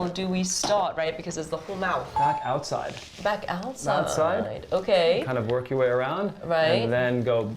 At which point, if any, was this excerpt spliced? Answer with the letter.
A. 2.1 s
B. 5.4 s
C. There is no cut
A